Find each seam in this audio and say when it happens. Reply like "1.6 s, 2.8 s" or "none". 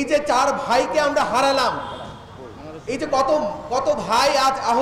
none